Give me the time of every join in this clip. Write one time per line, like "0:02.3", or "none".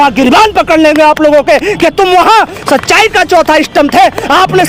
none